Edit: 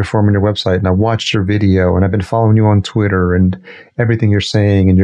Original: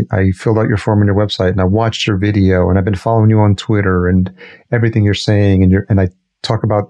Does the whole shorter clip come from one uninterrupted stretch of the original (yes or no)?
yes